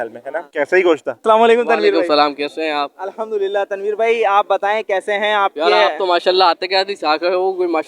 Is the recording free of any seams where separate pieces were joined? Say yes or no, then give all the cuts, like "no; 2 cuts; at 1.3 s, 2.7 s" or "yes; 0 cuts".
no; 1 cut; at 1.1 s